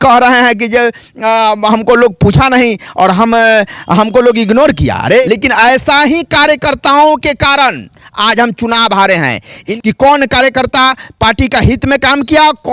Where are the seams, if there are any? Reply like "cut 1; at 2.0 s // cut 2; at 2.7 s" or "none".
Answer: cut 1; at 5.2 s // cut 2; at 9.7 s